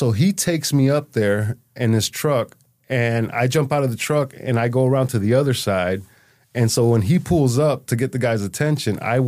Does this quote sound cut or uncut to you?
uncut